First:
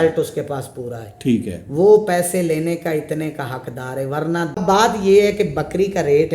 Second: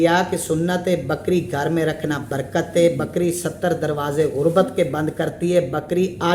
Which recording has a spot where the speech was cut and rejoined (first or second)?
first